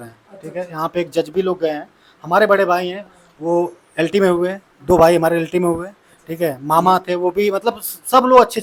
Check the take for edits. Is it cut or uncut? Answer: uncut